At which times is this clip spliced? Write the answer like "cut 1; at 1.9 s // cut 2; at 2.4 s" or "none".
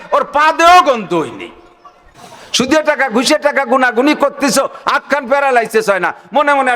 cut 1; at 2.4 s